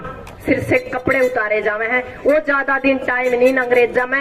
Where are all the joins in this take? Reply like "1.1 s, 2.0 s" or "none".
none